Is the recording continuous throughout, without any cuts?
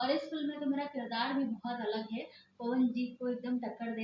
yes; 0 cuts

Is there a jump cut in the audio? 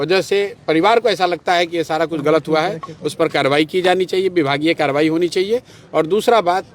no; 0 cuts

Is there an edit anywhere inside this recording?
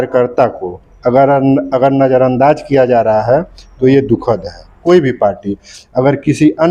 yes; 1 cut; at 4.8 s

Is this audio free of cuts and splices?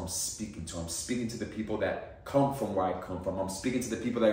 yes; 0 cuts

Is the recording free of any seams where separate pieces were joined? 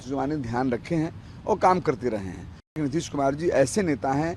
no; 1 cut; at 2.8 s

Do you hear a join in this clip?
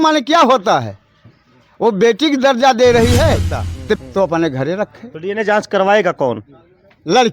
yes; 1 cut; at 4.0 s

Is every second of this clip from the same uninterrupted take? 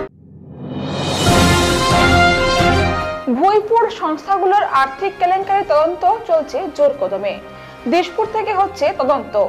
no; 1 cut; at 2.8 s

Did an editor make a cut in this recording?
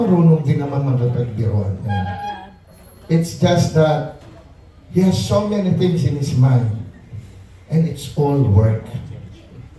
no; 0 cuts

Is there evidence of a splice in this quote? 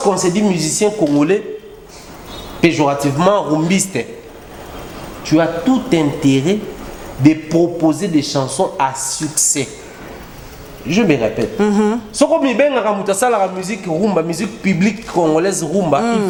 no; 0 cuts

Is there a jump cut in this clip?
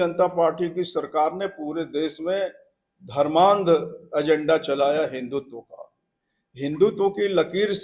no; 0 cuts

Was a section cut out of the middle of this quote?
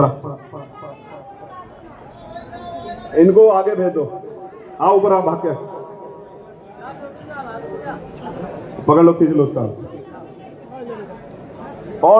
no; 0 cuts

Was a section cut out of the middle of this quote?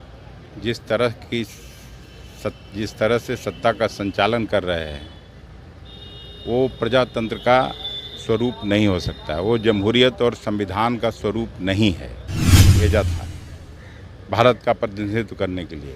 yes; 1 cut; at 12.7 s

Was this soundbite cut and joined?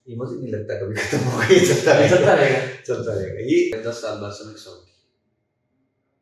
yes; 1 cut; at 3.8 s

